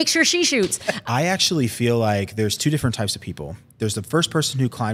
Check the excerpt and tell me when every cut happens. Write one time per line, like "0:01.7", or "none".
0:01.0